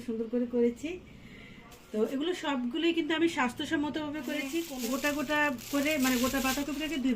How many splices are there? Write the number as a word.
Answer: one